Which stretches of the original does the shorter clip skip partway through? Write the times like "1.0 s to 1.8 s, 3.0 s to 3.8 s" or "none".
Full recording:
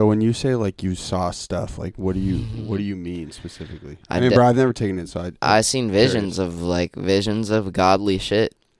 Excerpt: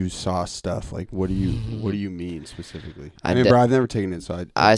none